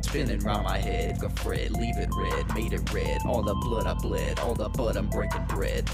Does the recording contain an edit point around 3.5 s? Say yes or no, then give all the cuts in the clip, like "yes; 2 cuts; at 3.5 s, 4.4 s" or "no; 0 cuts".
no; 1 cut; at 1.2 s